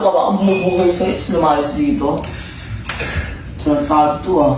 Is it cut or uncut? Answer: uncut